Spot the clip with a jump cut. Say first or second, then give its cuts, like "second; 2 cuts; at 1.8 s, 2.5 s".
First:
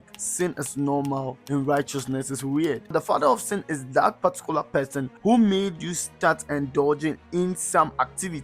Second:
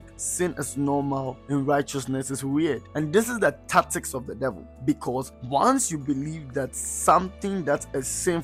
first; 1 cut; at 2.9 s